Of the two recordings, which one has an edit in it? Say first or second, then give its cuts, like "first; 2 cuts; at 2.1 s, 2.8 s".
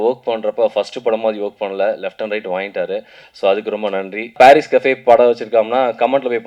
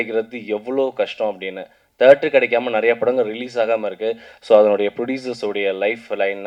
first; 1 cut; at 4.3 s